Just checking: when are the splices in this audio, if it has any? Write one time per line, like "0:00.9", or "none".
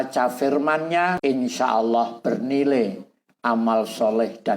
0:01.2